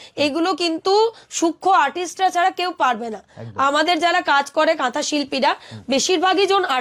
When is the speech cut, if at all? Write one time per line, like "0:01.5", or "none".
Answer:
none